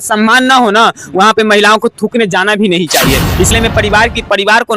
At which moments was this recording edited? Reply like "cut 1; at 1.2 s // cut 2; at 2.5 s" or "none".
cut 1; at 3.5 s